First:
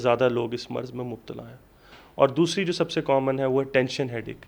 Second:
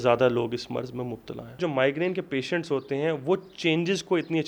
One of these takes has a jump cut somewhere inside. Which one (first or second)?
second